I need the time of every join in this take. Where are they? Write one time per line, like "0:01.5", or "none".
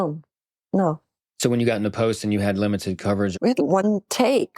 0:03.3